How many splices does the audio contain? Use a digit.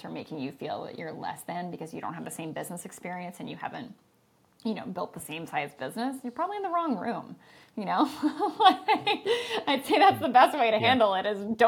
0